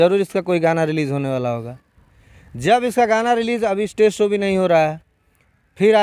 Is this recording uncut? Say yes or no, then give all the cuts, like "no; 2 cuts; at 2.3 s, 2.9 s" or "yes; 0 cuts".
yes; 0 cuts